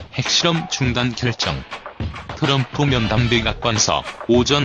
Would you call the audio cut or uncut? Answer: uncut